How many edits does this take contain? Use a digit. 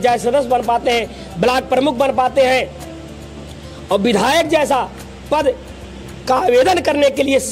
0